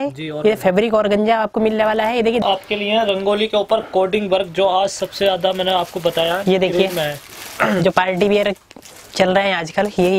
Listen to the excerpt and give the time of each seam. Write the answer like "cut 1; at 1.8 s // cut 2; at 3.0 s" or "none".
cut 1; at 2.4 s